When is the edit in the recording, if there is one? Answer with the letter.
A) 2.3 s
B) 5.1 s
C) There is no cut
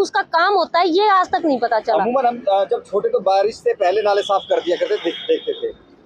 C